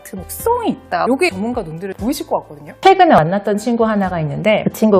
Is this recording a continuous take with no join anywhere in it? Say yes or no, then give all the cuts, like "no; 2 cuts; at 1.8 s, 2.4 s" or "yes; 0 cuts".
no; 2 cuts; at 1.1 s, 2.7 s